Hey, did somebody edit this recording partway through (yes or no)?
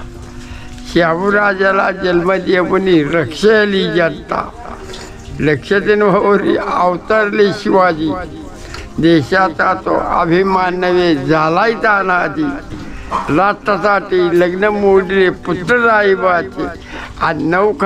no